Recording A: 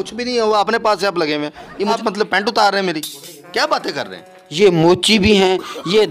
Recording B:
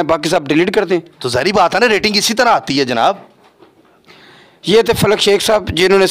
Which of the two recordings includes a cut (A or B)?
A